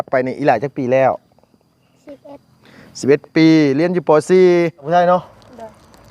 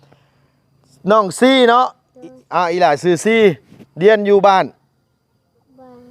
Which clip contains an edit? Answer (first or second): first